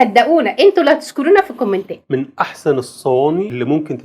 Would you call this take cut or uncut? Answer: uncut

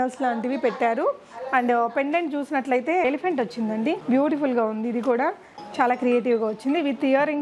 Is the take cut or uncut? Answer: cut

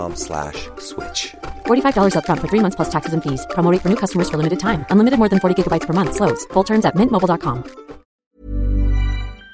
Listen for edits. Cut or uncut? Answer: cut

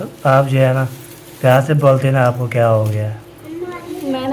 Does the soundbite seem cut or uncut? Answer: uncut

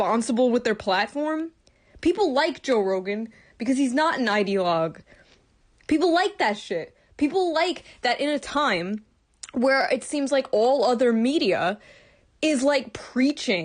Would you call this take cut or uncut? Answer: cut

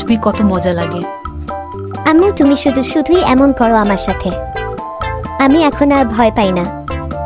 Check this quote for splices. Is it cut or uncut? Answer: uncut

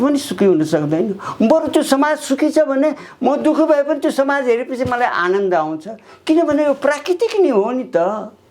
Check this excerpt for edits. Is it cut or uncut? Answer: uncut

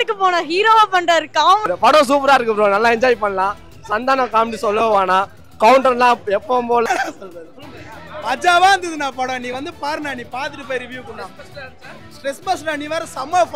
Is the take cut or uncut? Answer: cut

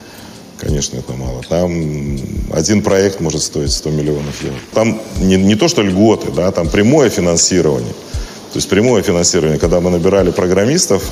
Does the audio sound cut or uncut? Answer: cut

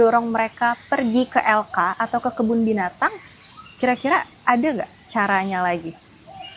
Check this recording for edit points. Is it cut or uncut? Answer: uncut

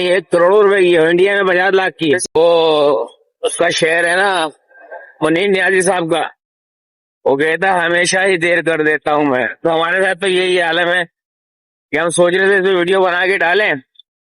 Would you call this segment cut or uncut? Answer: cut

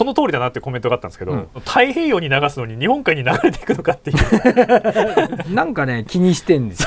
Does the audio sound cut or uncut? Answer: cut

